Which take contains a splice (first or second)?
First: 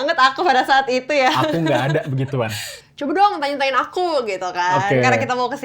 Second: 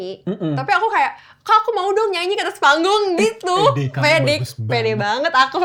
first